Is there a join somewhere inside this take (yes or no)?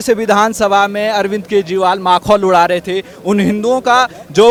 no